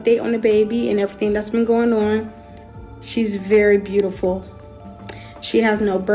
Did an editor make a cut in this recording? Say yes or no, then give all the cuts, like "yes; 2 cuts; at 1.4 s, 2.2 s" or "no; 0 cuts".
no; 0 cuts